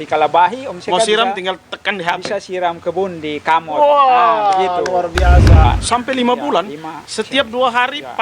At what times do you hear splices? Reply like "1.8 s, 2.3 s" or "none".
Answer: 5.6 s